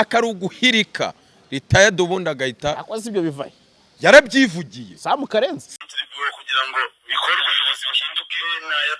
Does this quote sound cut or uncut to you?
cut